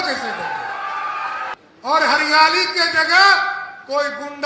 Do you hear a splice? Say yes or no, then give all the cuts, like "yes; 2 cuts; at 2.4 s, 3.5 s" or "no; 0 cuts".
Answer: yes; 1 cut; at 1.5 s